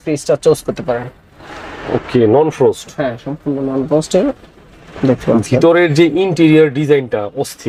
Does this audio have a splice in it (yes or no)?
no